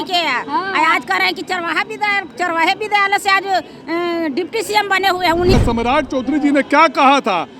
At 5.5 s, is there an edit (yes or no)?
yes